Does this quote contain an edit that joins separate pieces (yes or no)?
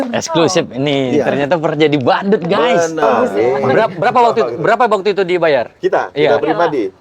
yes